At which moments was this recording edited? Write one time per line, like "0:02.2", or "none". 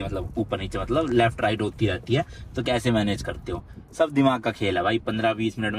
none